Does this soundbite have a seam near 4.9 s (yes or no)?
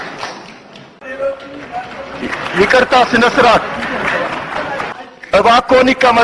yes